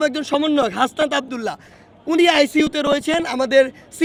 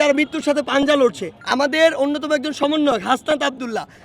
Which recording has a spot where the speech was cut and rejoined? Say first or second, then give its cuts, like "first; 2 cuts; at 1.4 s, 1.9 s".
second; 1 cut; at 1.3 s